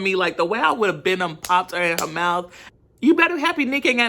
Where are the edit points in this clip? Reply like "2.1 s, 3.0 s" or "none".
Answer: 2.6 s